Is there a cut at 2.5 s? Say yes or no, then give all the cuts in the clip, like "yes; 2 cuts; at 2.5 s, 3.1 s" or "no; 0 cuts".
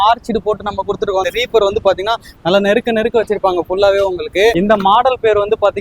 no; 2 cuts; at 1.3 s, 4.5 s